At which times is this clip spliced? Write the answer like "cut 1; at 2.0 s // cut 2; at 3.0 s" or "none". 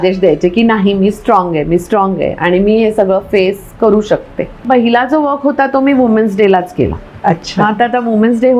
cut 1; at 4.7 s